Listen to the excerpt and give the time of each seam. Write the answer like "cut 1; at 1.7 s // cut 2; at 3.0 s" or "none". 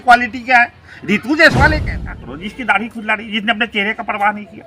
cut 1; at 1.9 s